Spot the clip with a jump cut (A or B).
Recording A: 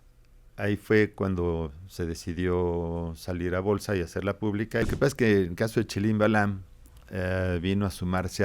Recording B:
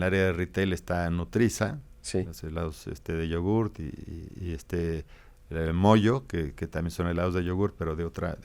A